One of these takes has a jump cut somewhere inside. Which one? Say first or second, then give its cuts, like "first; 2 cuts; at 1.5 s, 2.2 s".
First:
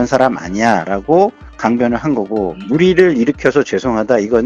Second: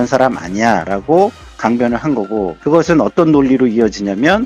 first; 1 cut; at 2.6 s